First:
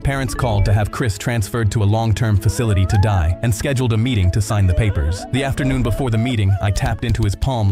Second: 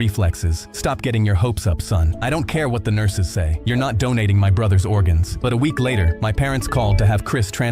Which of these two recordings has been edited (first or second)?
second